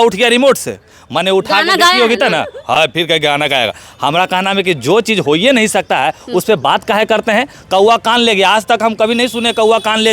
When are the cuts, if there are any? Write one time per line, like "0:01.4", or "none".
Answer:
none